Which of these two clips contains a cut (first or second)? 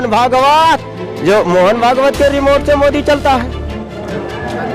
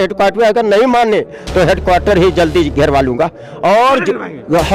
first